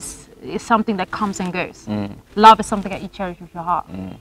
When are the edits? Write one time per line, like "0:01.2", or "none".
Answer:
none